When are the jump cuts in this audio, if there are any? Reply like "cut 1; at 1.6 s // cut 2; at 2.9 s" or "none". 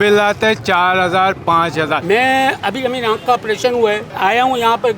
cut 1; at 2.0 s // cut 2; at 4.1 s